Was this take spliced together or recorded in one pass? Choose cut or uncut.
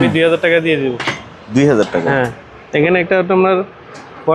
uncut